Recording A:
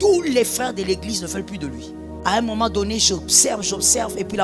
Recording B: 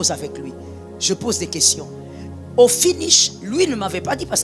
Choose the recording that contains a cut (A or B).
A